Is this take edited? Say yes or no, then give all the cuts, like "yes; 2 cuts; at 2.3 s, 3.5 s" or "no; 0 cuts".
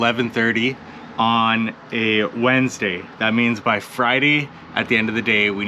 no; 0 cuts